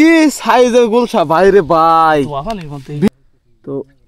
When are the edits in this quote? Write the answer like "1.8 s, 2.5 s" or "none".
3.1 s